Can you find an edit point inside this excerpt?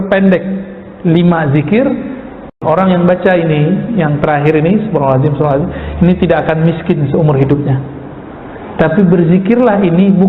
yes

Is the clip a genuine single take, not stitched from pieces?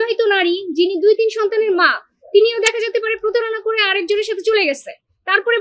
yes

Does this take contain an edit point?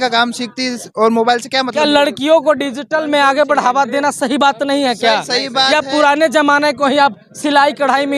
no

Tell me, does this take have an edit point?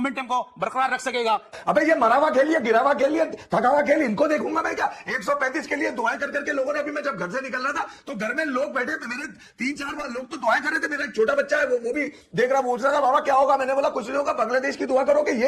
yes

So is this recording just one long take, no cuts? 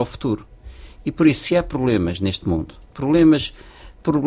yes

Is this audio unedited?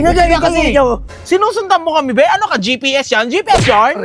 no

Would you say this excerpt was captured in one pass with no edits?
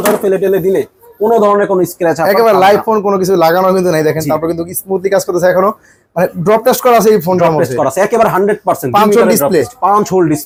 yes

